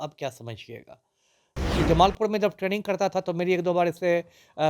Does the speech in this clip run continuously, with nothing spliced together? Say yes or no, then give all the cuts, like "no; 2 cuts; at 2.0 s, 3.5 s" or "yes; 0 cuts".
no; 1 cut; at 1.5 s